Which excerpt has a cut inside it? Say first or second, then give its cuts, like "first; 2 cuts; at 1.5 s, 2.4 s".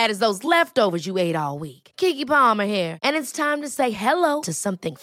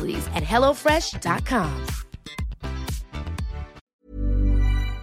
second; 1 cut; at 3.8 s